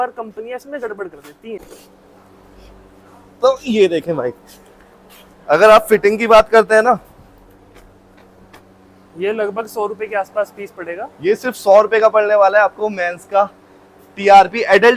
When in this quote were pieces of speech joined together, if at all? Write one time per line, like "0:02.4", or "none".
0:01.6